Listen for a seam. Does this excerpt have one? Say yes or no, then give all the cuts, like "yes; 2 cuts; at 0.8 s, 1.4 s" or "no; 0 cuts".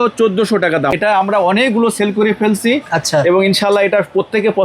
yes; 1 cut; at 0.9 s